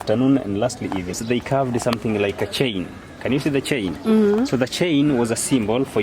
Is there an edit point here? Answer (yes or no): yes